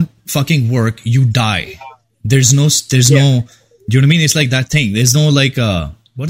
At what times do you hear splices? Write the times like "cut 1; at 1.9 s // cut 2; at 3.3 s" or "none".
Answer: none